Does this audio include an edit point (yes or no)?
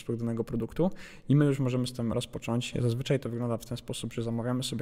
no